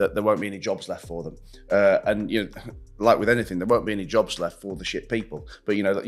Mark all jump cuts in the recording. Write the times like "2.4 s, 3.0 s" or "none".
none